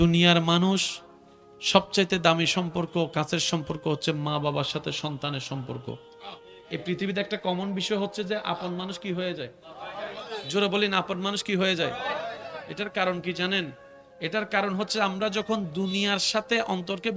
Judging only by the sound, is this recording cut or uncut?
cut